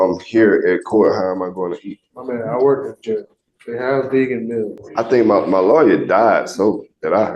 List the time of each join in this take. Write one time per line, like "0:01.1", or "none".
0:04.8